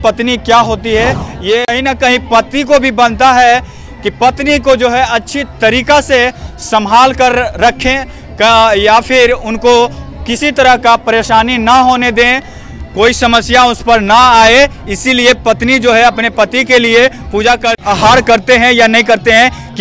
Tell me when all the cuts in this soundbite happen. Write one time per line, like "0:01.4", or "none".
0:01.7
0:17.8